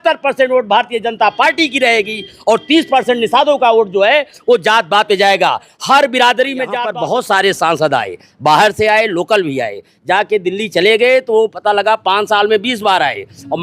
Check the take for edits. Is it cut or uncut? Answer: cut